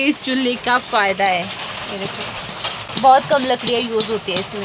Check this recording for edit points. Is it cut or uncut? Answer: cut